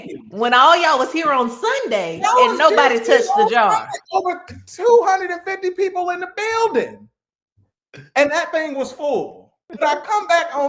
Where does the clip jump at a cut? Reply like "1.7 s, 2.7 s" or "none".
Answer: 9.6 s

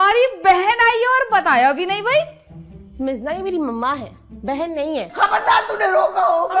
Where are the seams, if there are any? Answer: 5.1 s

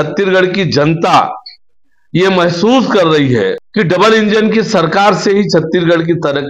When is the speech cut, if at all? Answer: 3.6 s

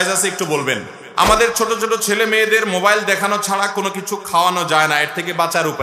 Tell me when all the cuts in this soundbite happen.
1.0 s

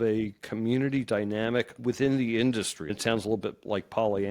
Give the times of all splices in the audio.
1.8 s, 2.8 s

